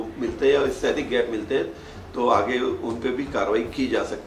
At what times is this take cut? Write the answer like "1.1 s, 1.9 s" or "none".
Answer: none